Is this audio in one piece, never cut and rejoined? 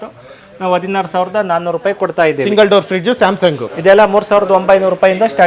no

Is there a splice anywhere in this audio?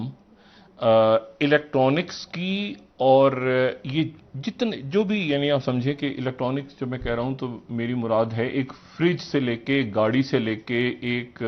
no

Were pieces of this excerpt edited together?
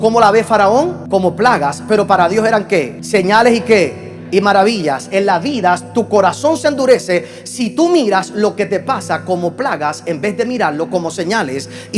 yes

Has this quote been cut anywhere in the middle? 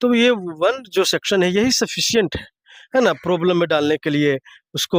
no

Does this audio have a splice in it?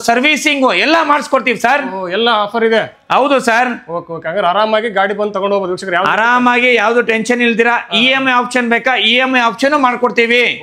no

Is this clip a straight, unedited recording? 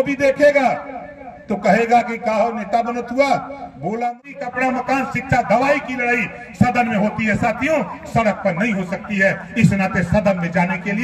no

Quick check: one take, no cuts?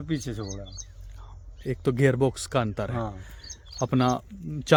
yes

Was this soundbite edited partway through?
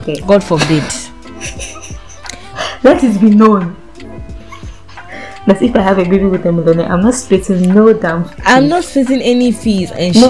no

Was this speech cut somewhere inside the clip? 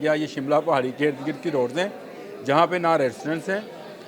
no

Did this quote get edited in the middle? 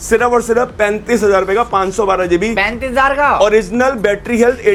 no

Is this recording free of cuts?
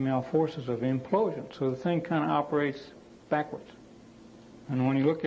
no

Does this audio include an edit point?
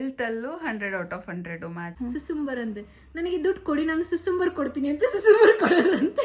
yes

